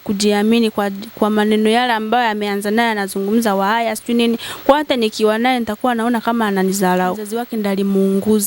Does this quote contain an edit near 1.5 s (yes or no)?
no